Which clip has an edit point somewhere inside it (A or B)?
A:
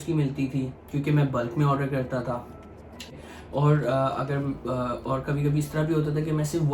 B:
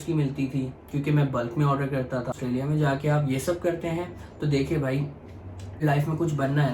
B